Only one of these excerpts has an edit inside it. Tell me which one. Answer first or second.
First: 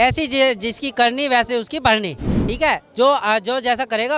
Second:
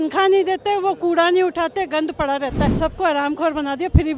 second